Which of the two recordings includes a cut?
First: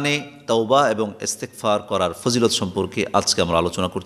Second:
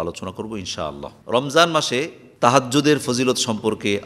second; 2 cuts; at 1.2 s, 2.2 s

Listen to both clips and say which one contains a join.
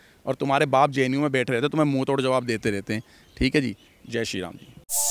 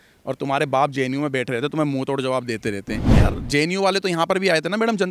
second; 1 cut; at 3.1 s

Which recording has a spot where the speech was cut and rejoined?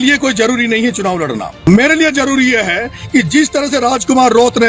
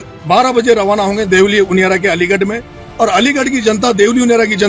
first; 1 cut; at 1.5 s

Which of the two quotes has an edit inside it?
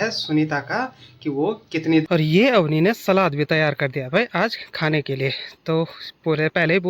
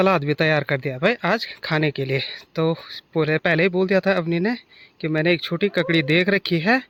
first; 1 cut; at 2.0 s

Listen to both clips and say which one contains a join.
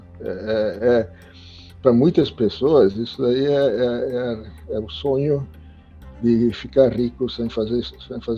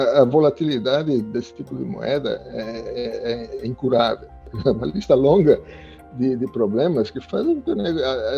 second; 1 cut; at 4.5 s

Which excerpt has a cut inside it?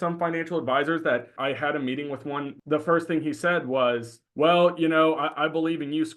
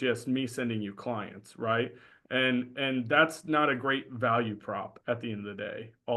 first; 3 cuts; at 1.3 s, 2.5 s, 4.2 s

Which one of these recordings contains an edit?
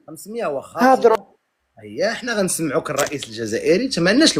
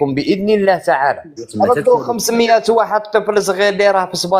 second; 1 cut; at 1.4 s

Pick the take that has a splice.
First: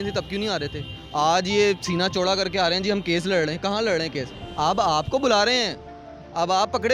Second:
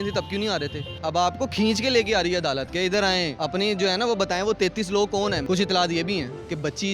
second; 3 cuts; at 0.9 s, 3.3 s, 5.4 s

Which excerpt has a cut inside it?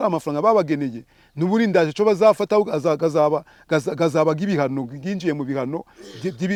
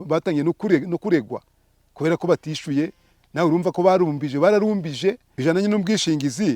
second; 1 cut; at 5.3 s

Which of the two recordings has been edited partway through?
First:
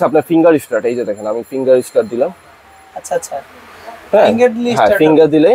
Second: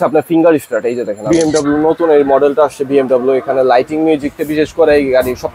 second; 1 cut; at 1.3 s

